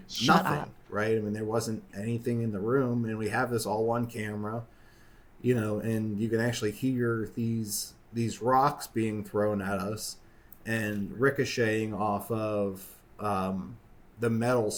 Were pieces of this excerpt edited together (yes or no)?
no